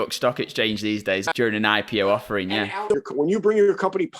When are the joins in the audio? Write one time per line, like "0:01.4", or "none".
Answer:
0:01.2
0:02.8